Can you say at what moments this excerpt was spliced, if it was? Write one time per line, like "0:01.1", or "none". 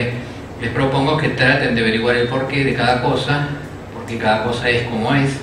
0:01.5